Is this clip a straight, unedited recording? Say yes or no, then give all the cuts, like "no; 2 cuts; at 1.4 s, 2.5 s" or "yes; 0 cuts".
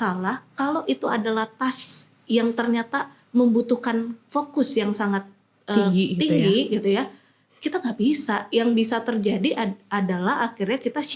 yes; 0 cuts